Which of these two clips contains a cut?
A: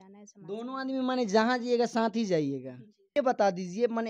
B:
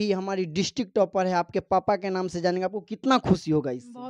A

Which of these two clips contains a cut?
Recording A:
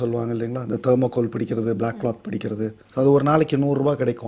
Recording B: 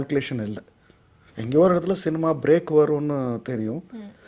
A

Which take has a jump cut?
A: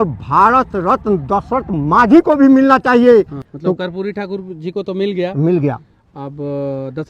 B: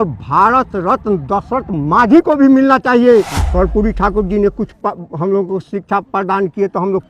B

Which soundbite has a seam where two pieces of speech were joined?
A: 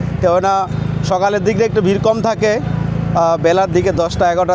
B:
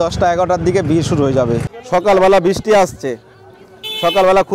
B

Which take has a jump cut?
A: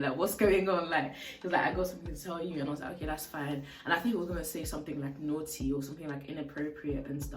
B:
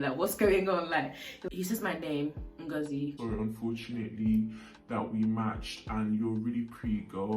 B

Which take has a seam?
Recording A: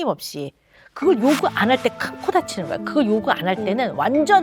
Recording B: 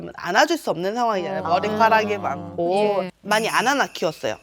B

